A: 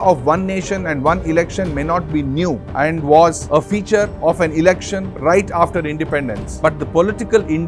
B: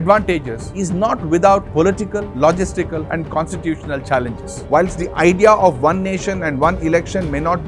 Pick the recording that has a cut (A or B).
B